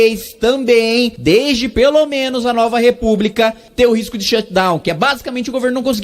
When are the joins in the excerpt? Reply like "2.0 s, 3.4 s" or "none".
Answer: 1.1 s, 3.6 s